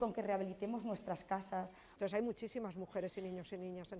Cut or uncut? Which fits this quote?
cut